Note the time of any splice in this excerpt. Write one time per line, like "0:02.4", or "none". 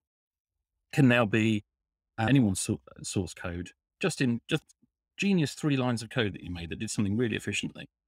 none